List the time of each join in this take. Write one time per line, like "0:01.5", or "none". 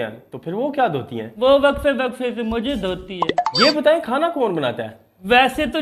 none